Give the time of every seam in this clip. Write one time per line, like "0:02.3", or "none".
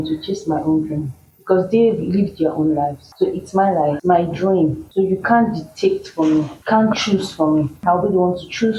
0:03.0
0:04.0
0:04.8
0:06.6
0:07.7